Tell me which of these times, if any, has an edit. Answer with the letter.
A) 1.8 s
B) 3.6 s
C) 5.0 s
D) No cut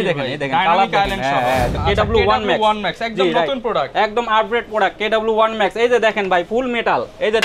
A